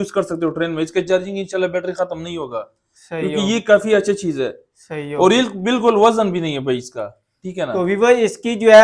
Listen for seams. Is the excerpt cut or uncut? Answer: uncut